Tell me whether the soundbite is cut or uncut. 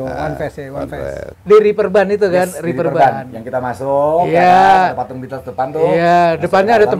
cut